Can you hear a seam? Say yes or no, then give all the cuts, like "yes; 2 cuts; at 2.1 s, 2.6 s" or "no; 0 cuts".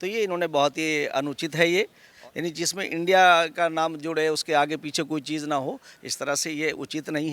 yes; 1 cut; at 2.1 s